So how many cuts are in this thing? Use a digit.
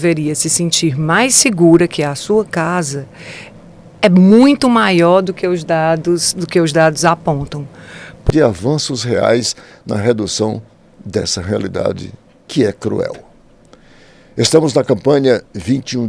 1